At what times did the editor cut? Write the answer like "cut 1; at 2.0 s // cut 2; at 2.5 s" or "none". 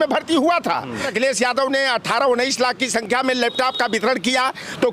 cut 1; at 1.1 s